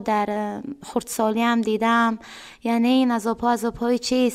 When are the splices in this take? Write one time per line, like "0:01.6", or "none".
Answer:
none